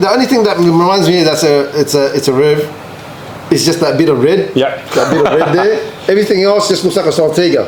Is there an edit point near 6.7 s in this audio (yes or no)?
no